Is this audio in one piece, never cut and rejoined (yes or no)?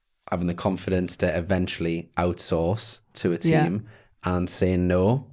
yes